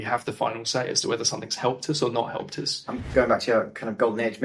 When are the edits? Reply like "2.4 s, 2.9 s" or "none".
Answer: 3.1 s